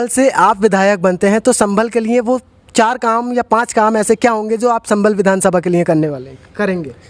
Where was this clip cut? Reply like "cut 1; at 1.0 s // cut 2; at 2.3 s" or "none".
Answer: none